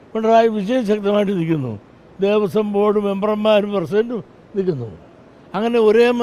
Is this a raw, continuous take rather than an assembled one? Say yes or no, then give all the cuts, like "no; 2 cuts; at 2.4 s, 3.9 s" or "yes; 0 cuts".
yes; 0 cuts